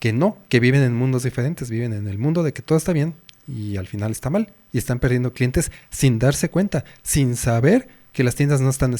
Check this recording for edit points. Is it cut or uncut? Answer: uncut